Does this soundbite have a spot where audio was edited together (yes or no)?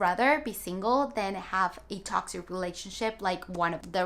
no